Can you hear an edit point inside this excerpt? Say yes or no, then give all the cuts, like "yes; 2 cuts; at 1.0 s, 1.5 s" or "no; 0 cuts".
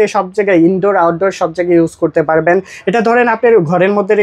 no; 0 cuts